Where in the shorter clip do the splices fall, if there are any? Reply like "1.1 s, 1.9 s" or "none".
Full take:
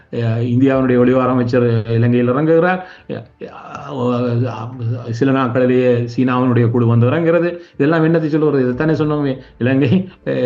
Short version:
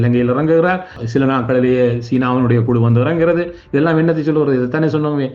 0.9 s